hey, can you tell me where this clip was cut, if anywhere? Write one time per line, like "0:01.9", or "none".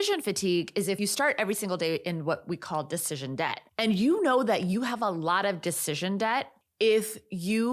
0:03.6
0:06.6